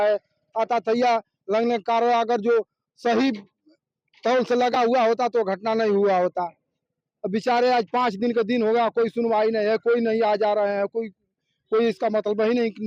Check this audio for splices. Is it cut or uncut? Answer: uncut